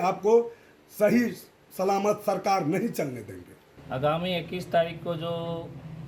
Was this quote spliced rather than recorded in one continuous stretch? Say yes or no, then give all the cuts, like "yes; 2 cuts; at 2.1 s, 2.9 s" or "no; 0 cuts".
no; 0 cuts